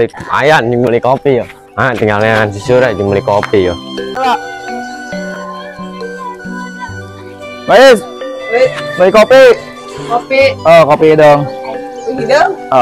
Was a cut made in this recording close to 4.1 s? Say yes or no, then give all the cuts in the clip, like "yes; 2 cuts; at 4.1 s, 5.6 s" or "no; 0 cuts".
yes; 1 cut; at 4.1 s